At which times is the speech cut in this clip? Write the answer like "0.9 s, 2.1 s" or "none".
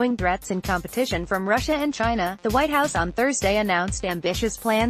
none